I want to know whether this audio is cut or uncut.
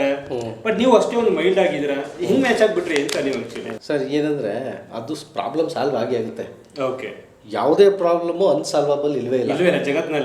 uncut